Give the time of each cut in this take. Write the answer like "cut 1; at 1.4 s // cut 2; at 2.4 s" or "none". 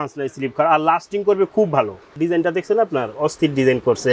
cut 1; at 2.2 s